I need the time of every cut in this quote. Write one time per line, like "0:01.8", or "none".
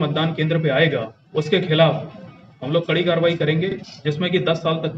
0:03.8